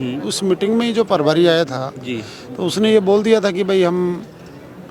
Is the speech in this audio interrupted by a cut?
no; 0 cuts

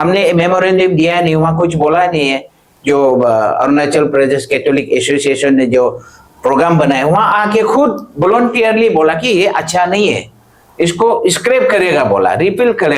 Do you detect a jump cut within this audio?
no; 0 cuts

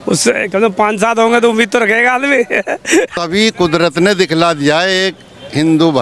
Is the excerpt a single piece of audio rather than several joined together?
no; 1 cut; at 3.1 s

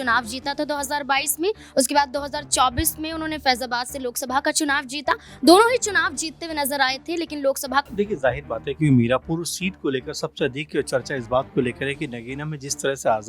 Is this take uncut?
no; 1 cut; at 7.9 s

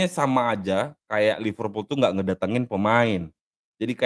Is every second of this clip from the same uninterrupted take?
yes; 0 cuts

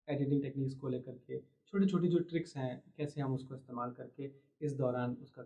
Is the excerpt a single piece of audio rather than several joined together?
yes; 0 cuts

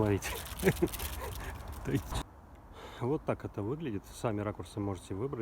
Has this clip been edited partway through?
yes; 1 cut; at 2.1 s

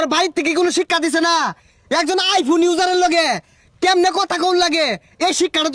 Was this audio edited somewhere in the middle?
no; 0 cuts

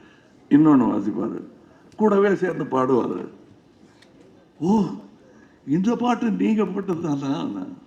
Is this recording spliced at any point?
no; 0 cuts

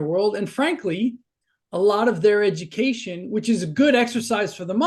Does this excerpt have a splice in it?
no; 0 cuts

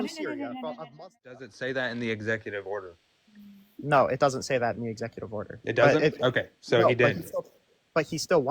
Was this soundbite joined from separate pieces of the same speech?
yes; 1 cut; at 1.5 s

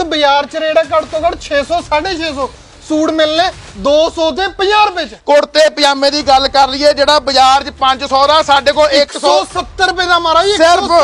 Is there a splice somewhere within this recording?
yes; 1 cut; at 5.1 s

